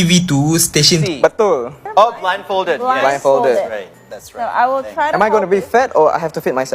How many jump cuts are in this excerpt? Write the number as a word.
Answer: one